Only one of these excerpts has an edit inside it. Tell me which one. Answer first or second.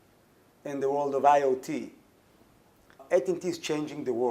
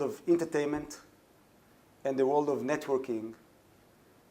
first